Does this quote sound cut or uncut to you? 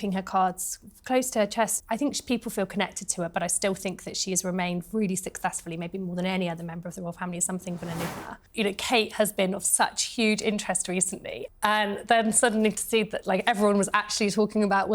cut